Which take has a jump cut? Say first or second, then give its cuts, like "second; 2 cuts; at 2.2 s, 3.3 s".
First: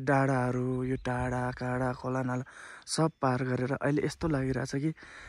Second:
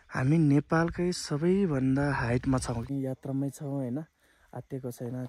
second; 1 cut; at 2.9 s